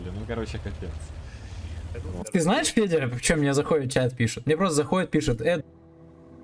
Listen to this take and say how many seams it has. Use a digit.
1